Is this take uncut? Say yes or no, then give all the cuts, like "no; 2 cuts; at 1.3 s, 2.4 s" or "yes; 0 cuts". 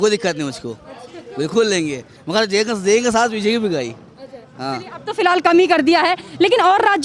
yes; 0 cuts